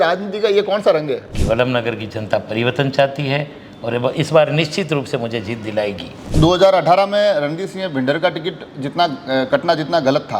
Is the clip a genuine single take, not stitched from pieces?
no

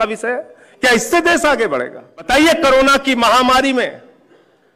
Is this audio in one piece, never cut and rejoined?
no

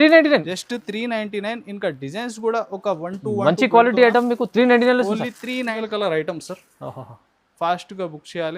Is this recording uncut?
no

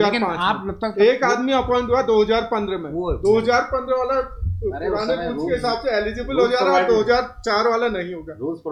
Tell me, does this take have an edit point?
no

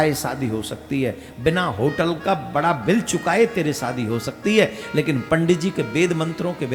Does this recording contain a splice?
no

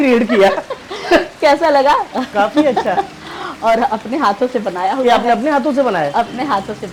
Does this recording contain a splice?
no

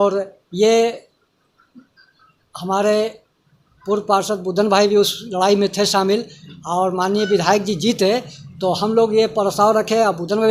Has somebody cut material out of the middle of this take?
no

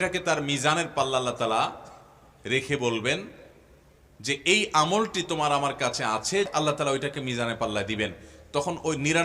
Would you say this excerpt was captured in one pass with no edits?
no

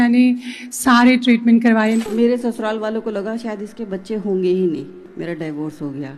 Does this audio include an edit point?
yes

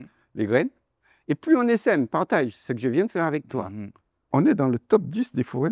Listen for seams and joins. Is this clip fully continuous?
no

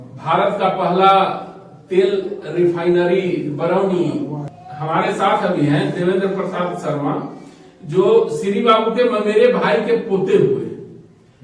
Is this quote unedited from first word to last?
yes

